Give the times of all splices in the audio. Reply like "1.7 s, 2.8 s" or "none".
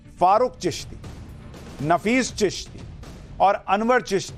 none